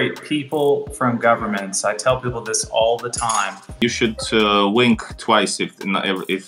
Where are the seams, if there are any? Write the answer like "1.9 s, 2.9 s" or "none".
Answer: 3.8 s

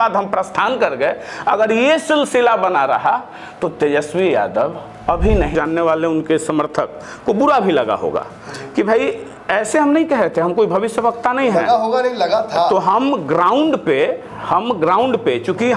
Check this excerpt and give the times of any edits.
5.5 s

